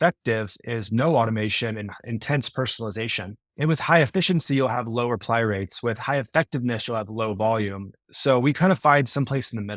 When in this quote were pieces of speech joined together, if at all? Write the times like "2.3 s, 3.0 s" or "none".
3.4 s

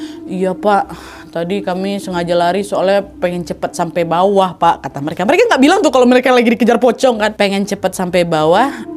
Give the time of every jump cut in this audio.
7.3 s

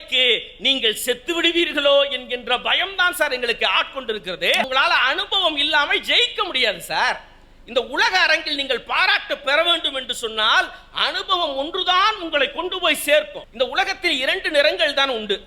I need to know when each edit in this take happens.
4.6 s, 13.4 s

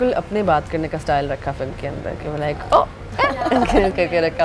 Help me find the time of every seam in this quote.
none

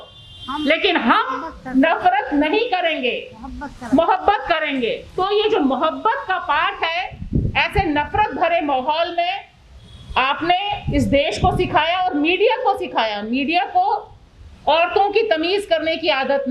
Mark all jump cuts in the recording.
none

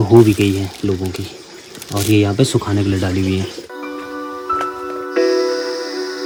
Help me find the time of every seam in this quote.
none

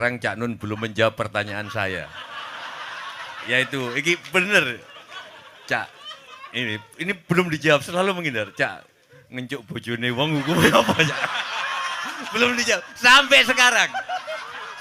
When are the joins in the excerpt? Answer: none

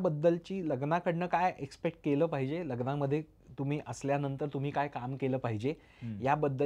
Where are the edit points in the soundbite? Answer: none

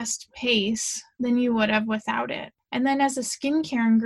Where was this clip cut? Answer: 2.5 s

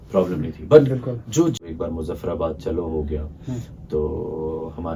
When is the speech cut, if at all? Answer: 1.6 s

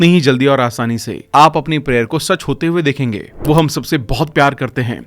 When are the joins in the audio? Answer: 3.3 s

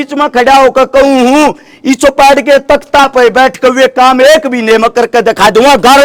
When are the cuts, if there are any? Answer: none

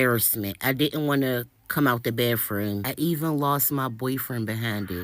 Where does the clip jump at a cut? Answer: 2.9 s

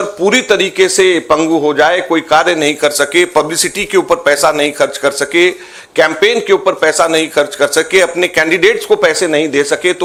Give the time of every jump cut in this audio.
none

